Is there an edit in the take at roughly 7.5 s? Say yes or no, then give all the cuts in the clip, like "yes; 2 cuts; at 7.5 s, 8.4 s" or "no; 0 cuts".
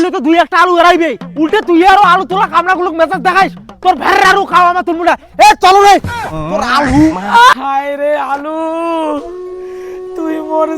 yes; 1 cut; at 7.5 s